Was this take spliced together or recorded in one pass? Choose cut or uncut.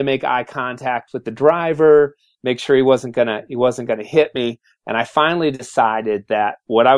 uncut